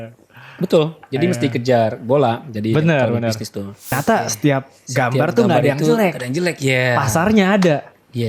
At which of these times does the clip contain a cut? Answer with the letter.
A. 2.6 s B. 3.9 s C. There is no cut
B